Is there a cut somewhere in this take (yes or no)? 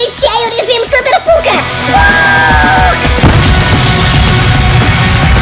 no